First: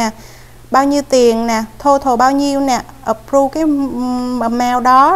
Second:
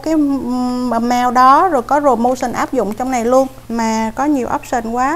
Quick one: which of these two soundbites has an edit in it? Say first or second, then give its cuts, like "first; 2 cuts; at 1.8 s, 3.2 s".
second; 1 cut; at 3.6 s